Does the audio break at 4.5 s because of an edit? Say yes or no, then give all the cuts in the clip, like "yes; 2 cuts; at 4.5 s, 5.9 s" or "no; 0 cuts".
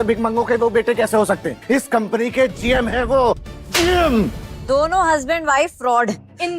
yes; 1 cut; at 4.5 s